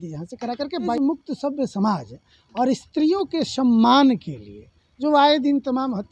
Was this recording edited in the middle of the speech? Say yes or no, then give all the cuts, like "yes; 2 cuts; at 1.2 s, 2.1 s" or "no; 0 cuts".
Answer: yes; 1 cut; at 1.0 s